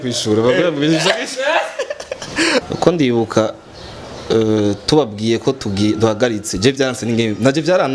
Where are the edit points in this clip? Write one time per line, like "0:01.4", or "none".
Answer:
0:02.7